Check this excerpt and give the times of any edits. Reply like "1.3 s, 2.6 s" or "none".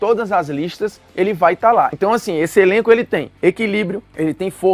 1.9 s